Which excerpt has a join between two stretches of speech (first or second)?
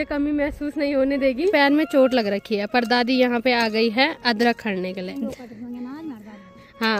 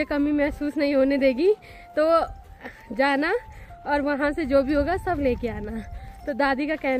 first